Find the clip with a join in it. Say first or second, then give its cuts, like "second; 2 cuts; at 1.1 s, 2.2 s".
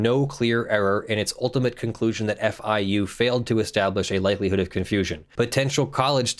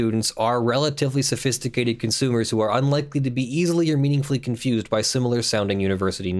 first; 1 cut; at 5.2 s